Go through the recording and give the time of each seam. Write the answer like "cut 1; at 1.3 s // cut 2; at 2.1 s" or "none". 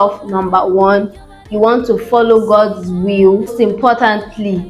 cut 1; at 3.5 s